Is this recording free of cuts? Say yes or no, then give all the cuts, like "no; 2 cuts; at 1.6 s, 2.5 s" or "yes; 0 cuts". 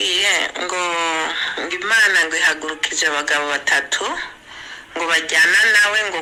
yes; 0 cuts